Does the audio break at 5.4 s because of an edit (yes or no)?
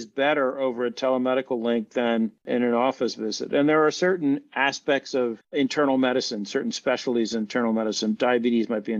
no